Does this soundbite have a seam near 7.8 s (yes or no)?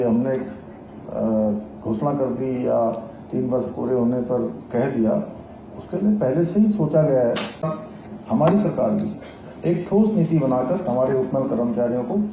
yes